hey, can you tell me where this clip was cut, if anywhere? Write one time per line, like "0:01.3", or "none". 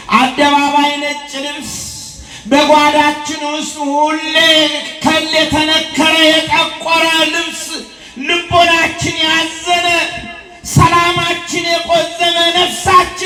none